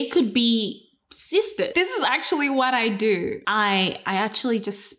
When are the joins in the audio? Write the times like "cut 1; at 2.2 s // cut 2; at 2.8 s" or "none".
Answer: cut 1; at 1.7 s // cut 2; at 3.4 s